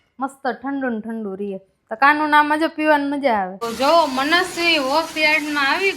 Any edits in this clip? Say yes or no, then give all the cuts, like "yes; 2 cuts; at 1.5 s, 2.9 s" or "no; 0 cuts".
yes; 1 cut; at 3.7 s